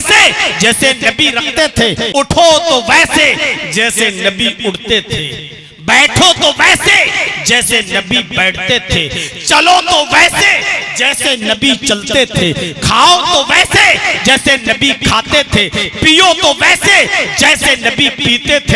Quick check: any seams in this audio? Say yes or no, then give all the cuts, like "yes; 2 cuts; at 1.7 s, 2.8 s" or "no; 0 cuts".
yes; 1 cut; at 2.3 s